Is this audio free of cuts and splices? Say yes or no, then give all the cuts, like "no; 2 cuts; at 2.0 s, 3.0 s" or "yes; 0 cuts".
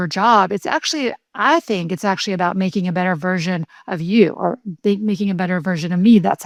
yes; 0 cuts